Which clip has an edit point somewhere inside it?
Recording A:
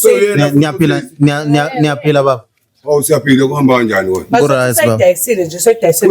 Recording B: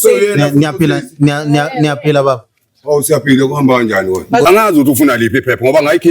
B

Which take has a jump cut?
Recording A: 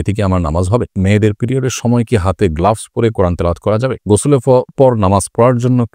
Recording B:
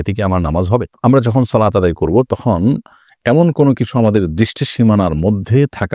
A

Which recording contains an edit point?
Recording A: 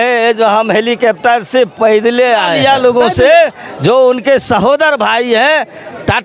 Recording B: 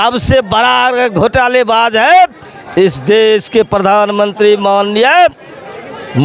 A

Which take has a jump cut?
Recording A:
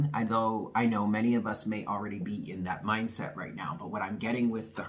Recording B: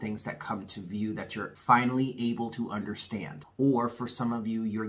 B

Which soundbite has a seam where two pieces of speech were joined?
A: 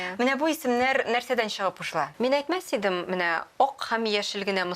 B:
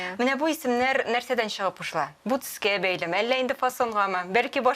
A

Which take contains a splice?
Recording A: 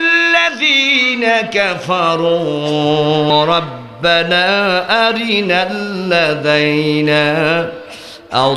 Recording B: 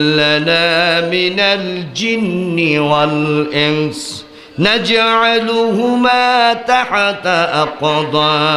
A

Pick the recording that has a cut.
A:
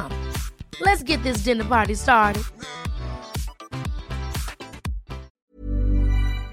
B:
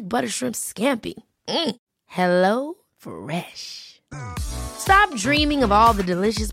A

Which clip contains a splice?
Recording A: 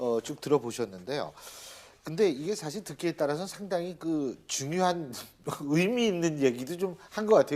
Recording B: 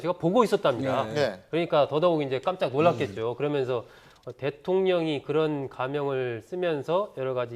A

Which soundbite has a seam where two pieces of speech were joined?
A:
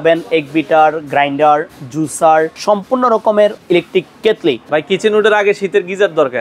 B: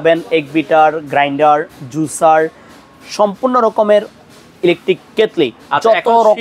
A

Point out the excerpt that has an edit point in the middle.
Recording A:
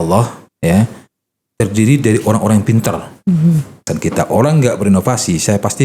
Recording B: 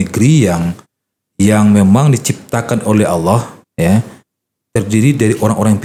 A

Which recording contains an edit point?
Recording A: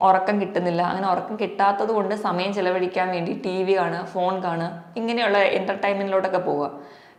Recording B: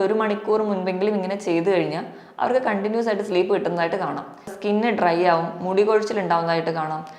B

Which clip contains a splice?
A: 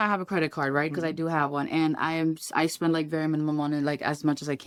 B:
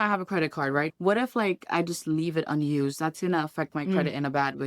B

